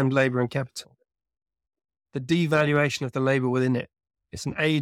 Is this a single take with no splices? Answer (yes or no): yes